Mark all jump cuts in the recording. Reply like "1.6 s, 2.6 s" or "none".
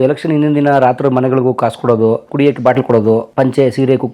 2.3 s, 3.3 s